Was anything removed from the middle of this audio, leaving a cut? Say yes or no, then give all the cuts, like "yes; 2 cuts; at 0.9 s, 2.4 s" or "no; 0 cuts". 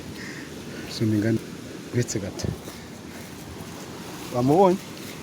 yes; 1 cut; at 1.4 s